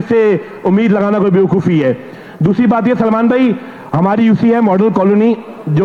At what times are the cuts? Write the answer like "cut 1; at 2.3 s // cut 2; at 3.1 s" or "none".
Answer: none

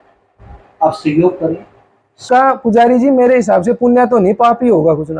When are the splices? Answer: cut 1; at 2.2 s

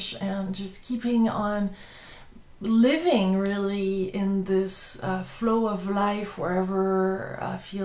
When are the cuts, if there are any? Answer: cut 1; at 1.3 s

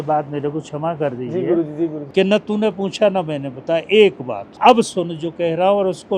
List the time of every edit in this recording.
cut 1; at 2.0 s // cut 2; at 4.5 s

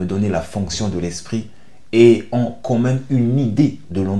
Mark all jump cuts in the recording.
none

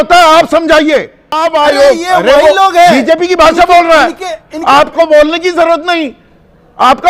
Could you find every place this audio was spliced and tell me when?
cut 1; at 1.4 s

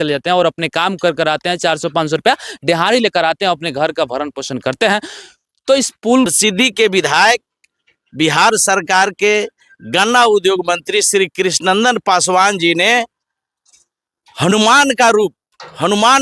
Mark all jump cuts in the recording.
cut 1; at 6.3 s

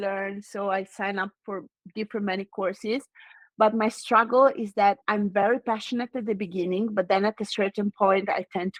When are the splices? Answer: none

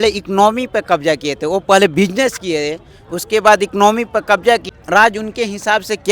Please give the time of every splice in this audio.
cut 1; at 4.7 s

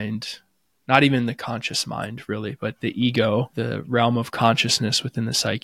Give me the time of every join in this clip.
cut 1; at 3.5 s

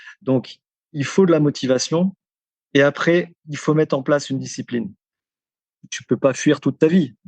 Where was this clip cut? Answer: cut 1; at 5.5 s

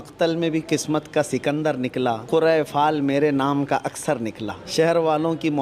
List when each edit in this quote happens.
cut 1; at 2.2 s // cut 2; at 4.5 s

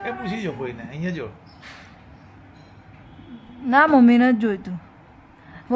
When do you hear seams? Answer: none

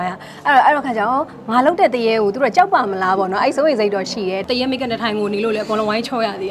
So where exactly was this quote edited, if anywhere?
cut 1; at 4.4 s

